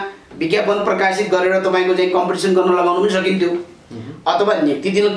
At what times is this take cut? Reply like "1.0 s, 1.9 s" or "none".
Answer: none